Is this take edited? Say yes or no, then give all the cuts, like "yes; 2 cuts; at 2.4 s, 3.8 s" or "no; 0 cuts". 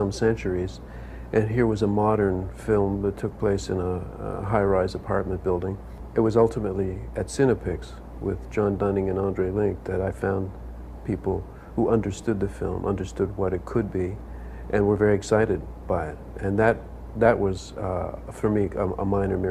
yes; 1 cut; at 4.4 s